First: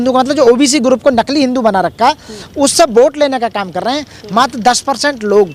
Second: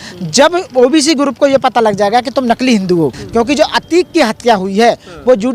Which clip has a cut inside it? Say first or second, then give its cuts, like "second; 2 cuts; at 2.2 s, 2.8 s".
second; 1 cut; at 3.2 s